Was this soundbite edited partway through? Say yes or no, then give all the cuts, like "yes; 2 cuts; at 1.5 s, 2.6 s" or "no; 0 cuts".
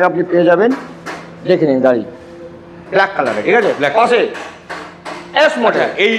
no; 0 cuts